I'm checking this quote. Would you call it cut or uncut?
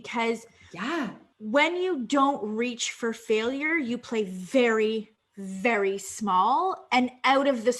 cut